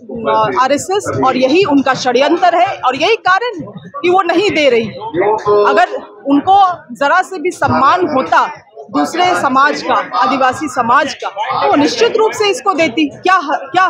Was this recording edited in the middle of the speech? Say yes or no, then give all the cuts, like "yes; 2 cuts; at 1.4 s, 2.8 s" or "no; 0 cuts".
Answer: no; 0 cuts